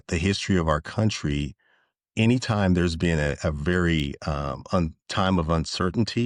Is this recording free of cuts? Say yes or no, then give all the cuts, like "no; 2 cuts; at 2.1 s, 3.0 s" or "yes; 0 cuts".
yes; 0 cuts